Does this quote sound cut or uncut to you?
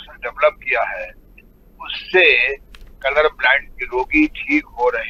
uncut